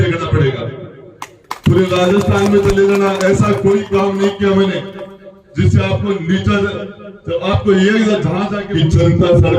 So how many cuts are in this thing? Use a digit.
1